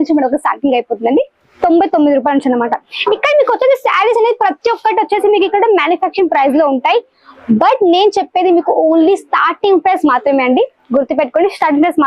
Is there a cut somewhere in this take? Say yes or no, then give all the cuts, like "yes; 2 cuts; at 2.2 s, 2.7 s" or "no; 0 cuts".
no; 0 cuts